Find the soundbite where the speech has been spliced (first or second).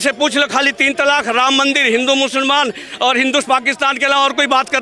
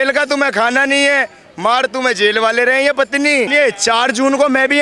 second